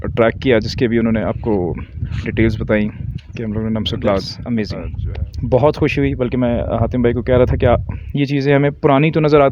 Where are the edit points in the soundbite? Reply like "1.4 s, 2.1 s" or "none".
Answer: 4.4 s